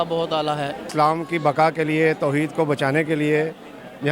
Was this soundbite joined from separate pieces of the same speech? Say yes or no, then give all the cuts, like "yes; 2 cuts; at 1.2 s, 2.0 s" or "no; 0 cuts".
yes; 1 cut; at 0.9 s